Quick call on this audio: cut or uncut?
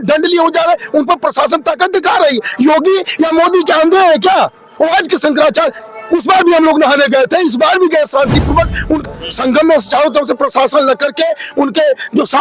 cut